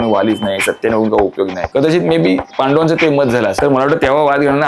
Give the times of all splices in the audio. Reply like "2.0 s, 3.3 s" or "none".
1.6 s, 2.5 s, 3.5 s

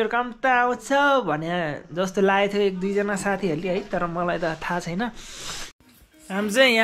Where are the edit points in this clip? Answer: 5.8 s

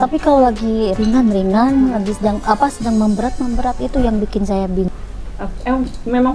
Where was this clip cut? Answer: 4.9 s

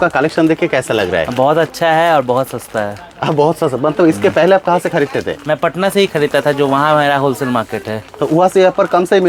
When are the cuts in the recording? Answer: none

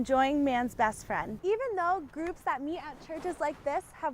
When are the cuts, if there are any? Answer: 1.3 s

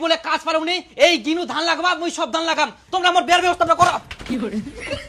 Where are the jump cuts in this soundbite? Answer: none

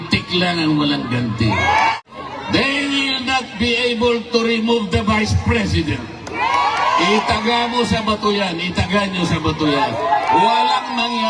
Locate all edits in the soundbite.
1.9 s

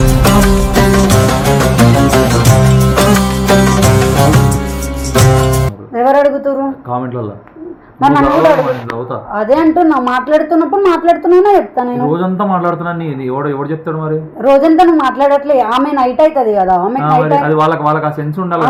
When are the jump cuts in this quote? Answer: none

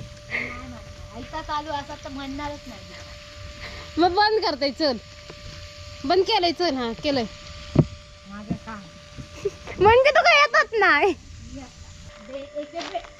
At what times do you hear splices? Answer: 12.0 s

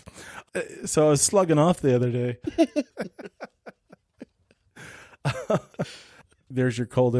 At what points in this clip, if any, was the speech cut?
6.2 s

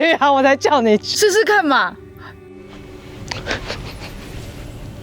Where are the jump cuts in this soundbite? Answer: 2.7 s

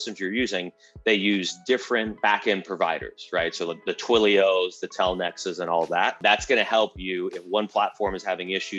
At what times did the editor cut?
2.1 s, 6.2 s

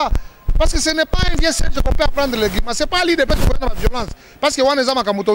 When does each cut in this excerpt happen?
none

